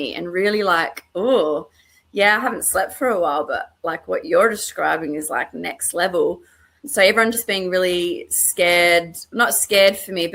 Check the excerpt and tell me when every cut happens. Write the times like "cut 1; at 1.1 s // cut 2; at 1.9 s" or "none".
cut 1; at 6.8 s